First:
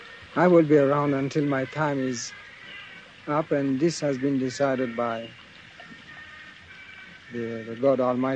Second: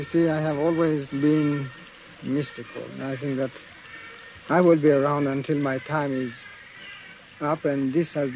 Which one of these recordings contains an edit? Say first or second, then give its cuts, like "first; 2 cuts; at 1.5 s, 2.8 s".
second; 1 cut; at 1.1 s